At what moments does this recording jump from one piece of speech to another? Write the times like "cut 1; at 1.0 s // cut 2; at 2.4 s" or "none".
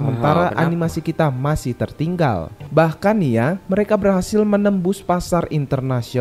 cut 1; at 2.6 s